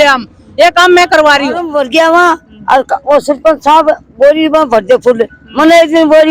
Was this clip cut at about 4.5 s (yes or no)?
no